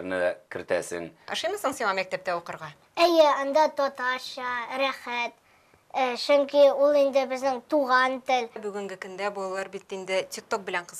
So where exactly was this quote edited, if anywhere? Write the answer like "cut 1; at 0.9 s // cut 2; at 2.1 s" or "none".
cut 1; at 1.2 s // cut 2; at 8.7 s